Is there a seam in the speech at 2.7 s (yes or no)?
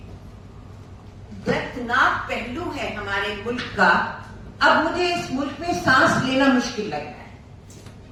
no